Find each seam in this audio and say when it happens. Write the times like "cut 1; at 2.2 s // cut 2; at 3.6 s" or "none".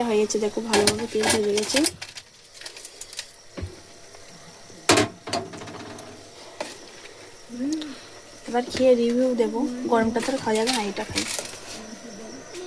none